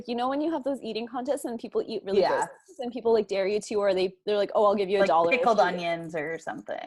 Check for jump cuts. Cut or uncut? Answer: uncut